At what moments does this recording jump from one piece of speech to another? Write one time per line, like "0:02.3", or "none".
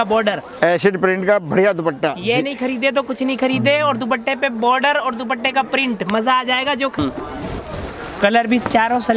0:07.0